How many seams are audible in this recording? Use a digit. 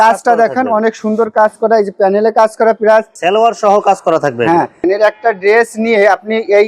2